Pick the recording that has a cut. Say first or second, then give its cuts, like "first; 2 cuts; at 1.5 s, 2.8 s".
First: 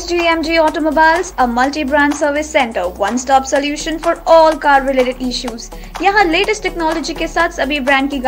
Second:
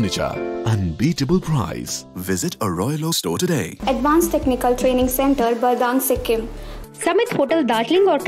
second; 2 cuts; at 3.7 s, 6.7 s